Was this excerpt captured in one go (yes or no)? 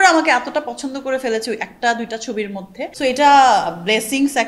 no